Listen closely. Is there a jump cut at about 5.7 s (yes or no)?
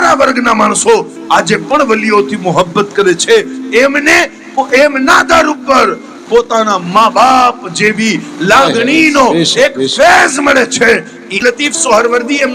no